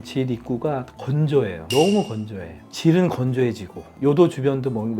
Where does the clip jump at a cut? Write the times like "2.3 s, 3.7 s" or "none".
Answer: 2.5 s